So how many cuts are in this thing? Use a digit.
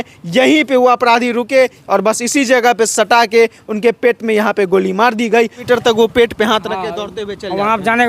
2